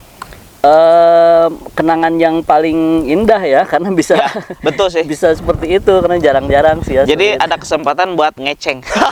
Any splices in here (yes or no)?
no